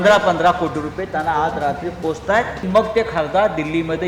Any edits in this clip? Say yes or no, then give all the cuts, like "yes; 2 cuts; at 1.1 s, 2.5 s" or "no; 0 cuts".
yes; 1 cut; at 2.6 s